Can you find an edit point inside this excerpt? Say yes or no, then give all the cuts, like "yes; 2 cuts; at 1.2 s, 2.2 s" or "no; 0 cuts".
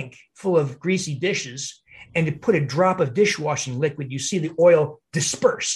no; 0 cuts